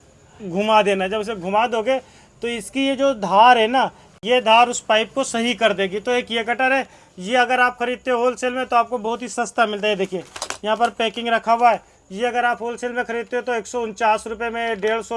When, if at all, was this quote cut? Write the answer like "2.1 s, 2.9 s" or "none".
none